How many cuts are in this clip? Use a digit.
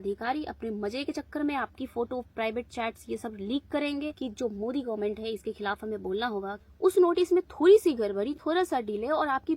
2